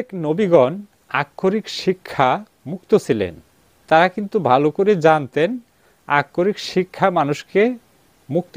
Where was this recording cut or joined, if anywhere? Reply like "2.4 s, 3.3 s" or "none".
3.7 s